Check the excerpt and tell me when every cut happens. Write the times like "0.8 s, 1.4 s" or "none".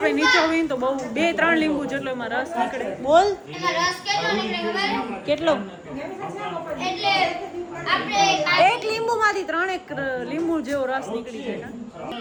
none